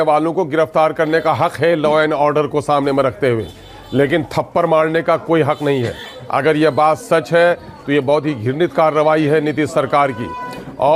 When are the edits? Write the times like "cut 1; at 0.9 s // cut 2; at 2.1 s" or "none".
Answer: none